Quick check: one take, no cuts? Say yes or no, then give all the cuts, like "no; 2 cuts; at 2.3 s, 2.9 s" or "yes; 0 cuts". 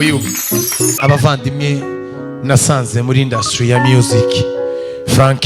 no; 1 cut; at 1.0 s